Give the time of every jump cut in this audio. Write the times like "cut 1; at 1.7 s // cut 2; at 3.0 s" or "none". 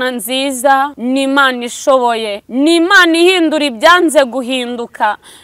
cut 1; at 1.0 s // cut 2; at 2.4 s